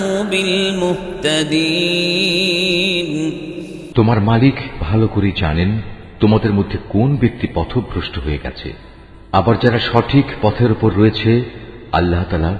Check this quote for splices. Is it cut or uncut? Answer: cut